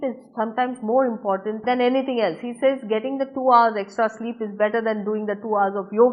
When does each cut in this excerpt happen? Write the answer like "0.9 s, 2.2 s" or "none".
1.6 s